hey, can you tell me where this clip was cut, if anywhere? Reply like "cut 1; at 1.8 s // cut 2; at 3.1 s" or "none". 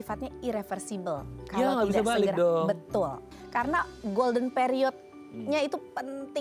cut 1; at 3.4 s